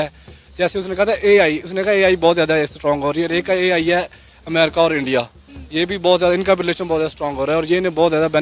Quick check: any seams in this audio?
no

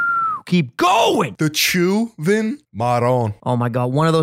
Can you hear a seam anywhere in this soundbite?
yes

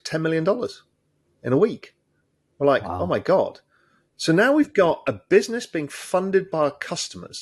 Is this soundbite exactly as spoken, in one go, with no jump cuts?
yes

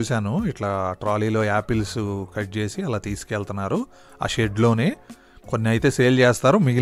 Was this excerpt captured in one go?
yes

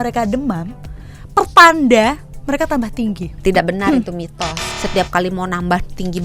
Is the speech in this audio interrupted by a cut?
yes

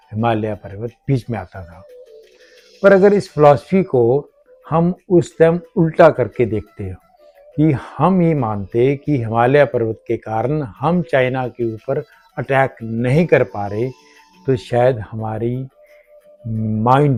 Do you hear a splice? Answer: no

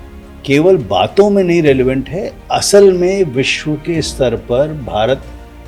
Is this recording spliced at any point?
no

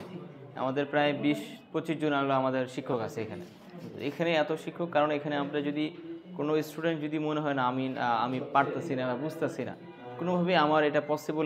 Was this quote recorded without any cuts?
yes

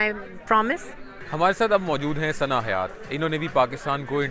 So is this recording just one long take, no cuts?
yes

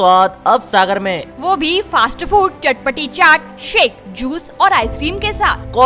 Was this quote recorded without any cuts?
yes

